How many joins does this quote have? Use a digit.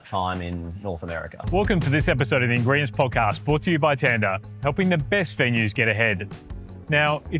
1